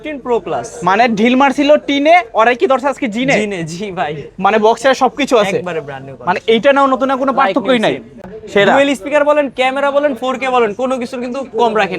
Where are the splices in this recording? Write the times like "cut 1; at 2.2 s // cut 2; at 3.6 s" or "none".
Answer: cut 1; at 8.2 s